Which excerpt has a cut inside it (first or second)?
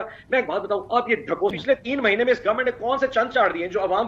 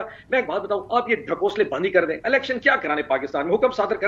first